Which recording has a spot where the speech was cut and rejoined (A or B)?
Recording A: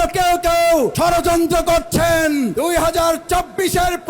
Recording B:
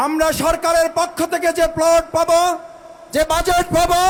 A